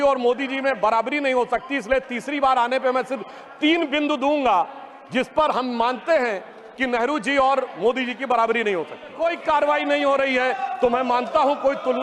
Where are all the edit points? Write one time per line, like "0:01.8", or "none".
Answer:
0:09.2

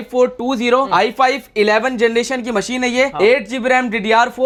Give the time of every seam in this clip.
none

